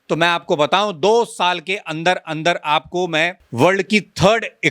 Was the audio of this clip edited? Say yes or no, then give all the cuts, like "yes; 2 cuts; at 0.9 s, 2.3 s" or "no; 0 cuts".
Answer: yes; 1 cut; at 3.4 s